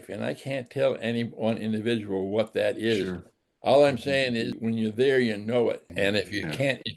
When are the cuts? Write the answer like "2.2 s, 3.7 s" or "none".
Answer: 4.6 s, 5.9 s